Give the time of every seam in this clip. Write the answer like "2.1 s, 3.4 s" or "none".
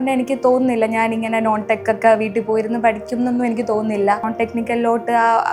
4.3 s